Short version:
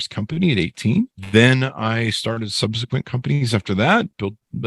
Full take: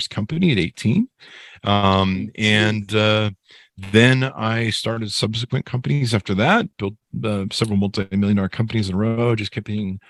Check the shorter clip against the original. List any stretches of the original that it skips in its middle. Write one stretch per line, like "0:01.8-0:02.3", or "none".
0:01.2-0:03.8